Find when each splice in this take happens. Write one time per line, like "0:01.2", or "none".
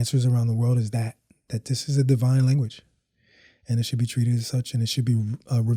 none